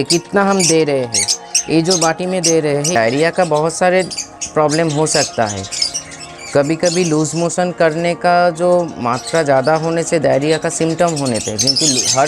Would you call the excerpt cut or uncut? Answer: cut